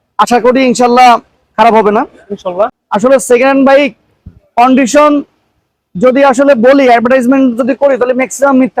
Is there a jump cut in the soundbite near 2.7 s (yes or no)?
yes